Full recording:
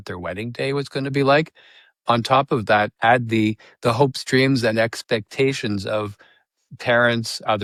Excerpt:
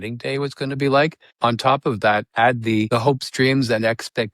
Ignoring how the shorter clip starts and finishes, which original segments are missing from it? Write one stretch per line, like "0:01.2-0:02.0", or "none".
0:01.6-0:01.9
0:03.5-0:03.8